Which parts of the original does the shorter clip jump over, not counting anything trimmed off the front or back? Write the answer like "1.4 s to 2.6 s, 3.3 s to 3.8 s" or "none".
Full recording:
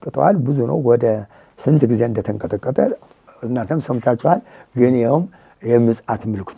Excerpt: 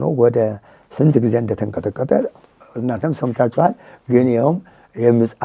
none